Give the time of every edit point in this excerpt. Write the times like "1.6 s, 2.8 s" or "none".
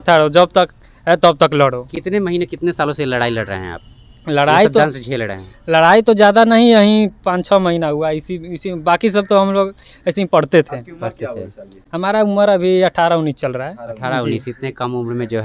none